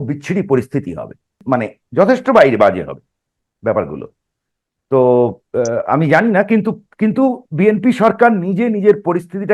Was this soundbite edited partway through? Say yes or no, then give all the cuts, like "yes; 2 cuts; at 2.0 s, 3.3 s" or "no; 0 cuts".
yes; 1 cut; at 1.4 s